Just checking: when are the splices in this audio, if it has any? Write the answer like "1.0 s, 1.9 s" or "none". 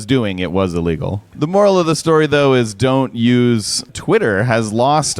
1.3 s, 3.9 s